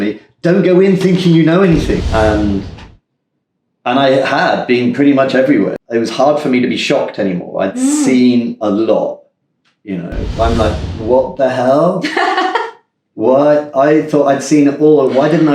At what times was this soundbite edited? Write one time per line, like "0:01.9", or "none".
0:02.0
0:05.7
0:10.4